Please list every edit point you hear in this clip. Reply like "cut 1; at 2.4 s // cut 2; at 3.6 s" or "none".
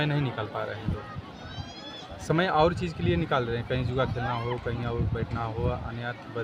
none